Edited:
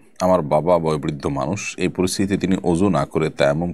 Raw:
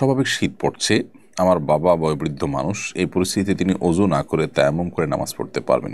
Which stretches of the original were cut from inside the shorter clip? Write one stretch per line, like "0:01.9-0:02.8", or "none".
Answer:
none